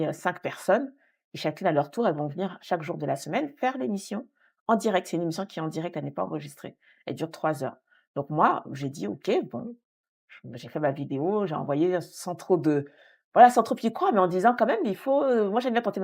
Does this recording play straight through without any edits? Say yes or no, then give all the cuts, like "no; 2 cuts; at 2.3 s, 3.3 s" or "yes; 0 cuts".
yes; 0 cuts